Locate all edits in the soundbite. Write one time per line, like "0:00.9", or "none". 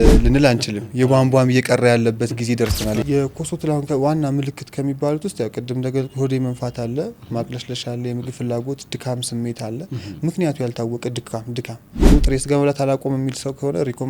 0:03.0
0:12.1